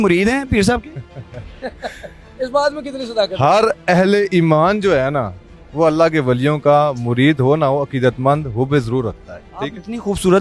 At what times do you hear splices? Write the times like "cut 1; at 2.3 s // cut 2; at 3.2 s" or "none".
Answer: none